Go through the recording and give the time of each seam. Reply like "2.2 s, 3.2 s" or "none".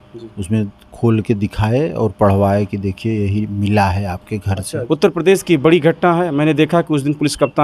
4.7 s